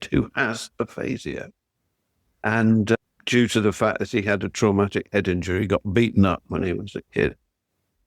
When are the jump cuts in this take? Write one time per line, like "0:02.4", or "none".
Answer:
none